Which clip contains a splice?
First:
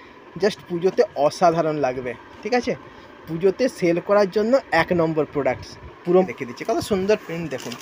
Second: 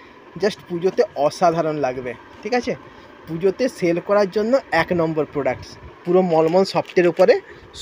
first; 1 cut; at 6.3 s

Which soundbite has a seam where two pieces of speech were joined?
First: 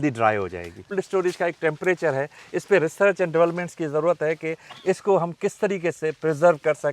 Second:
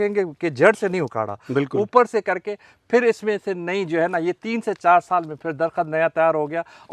first; 1 cut; at 0.9 s

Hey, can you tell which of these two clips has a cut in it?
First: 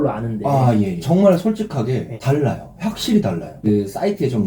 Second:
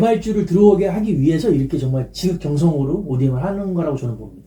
first; 3 cuts; at 1.0 s, 2.1 s, 3.6 s

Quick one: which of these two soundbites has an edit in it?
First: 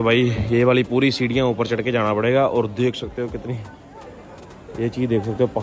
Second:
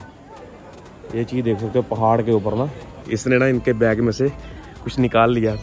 second; 1 cut; at 2.9 s

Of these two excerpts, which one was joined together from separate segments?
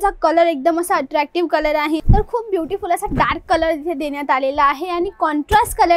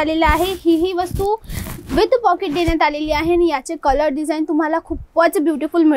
first; 1 cut; at 2.0 s

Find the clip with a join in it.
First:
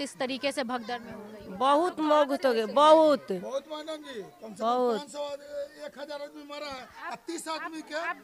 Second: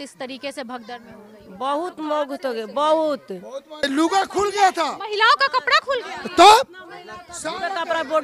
second; 1 cut; at 3.9 s

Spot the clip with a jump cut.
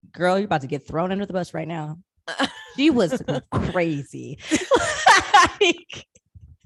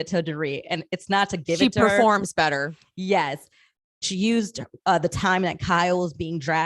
second; 1 cut; at 3.8 s

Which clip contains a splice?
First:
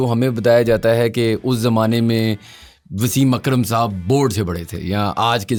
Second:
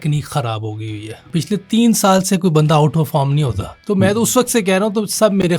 second; 2 cuts; at 1.2 s, 3.7 s

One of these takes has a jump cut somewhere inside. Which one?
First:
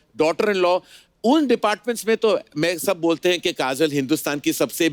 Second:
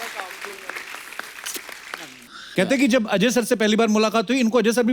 second; 1 cut; at 2.4 s

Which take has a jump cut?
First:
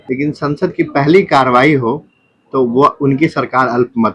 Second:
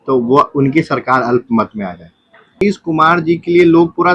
second; 1 cut; at 2.6 s

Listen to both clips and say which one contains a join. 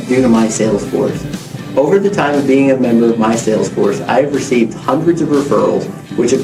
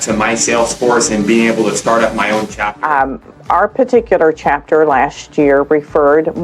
second; 1 cut; at 2.6 s

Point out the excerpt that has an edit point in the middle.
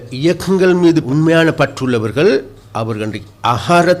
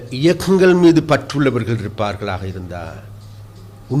first; 2 cuts; at 1.1 s, 2.6 s

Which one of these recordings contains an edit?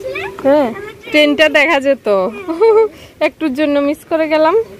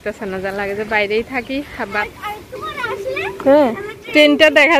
second; 1 cut; at 2.1 s

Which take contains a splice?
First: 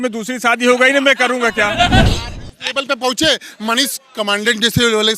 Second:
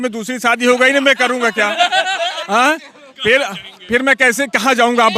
first; 1 cut; at 2.1 s

